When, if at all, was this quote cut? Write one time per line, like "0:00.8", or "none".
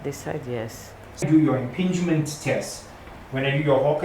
0:01.2